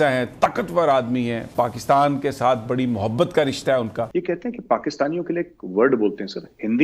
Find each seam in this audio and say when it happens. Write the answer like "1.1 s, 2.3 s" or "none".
4.1 s